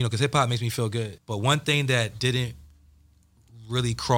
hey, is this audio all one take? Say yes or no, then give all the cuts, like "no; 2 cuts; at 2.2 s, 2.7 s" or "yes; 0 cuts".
no; 1 cut; at 1.2 s